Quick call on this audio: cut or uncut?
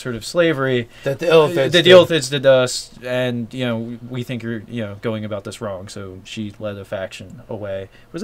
uncut